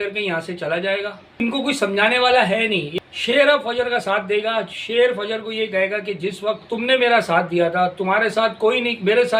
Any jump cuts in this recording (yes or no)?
yes